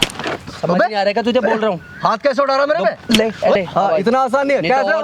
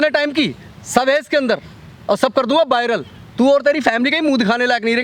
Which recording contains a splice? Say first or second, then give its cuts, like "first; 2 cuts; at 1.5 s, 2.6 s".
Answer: first; 1 cut; at 3.5 s